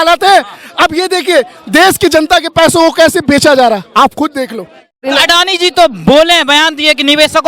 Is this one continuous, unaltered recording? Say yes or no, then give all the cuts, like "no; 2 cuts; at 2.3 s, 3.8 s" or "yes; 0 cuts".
no; 1 cut; at 5.1 s